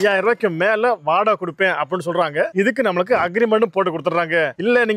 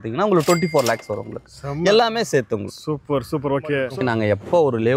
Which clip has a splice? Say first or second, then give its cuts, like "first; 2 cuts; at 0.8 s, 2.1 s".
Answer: second; 1 cut; at 3.8 s